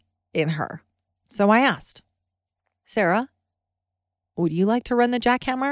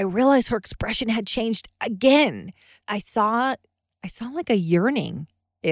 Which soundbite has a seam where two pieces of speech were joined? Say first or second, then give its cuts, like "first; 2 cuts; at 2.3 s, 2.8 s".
second; 1 cut; at 2.7 s